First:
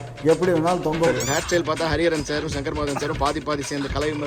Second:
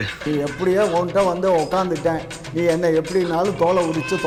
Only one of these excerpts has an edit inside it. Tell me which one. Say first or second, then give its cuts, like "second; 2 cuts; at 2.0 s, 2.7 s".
first; 1 cut; at 1.2 s